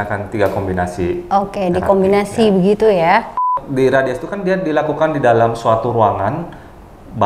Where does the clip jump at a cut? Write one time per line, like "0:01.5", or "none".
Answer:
0:03.6

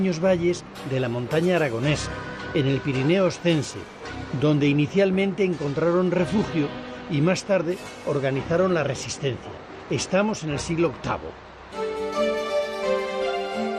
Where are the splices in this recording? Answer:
0:07.5

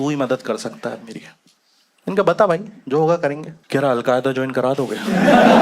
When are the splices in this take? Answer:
0:03.5

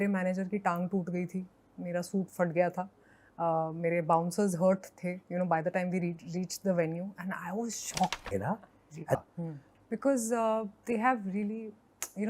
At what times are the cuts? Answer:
0:08.2

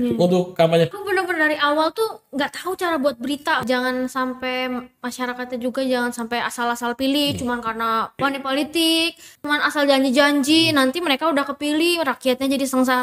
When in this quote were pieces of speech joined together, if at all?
0:00.9
0:03.6
0:08.2
0:09.3

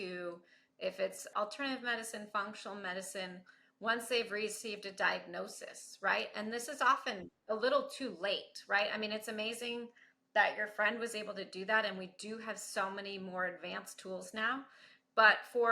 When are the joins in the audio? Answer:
0:01.3

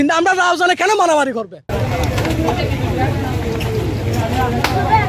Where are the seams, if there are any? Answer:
none

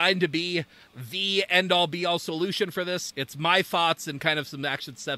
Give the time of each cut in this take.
none

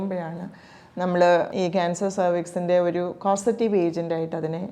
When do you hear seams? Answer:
0:01.5

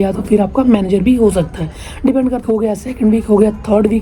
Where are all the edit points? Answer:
0:02.4

